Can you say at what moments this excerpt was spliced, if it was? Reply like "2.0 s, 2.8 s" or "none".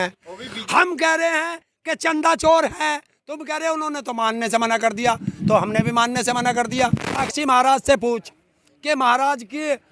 7.2 s